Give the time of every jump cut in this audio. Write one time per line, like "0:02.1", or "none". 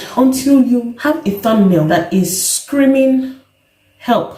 0:00.9
0:01.9